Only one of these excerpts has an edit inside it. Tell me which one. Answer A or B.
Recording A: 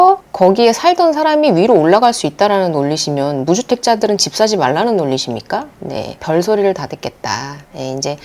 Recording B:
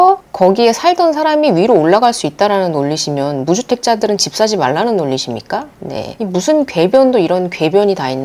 A